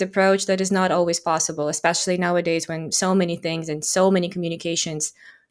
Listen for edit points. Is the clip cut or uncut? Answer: uncut